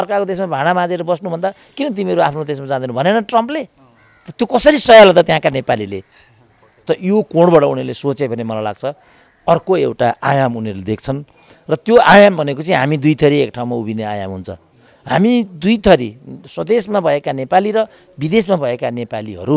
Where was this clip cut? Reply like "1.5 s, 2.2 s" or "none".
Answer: none